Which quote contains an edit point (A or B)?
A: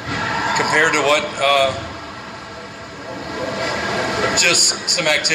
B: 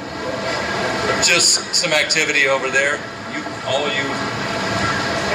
A